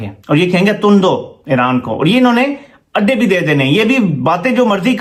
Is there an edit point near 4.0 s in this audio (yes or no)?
no